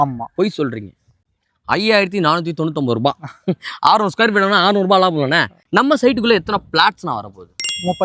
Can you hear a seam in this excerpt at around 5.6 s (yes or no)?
yes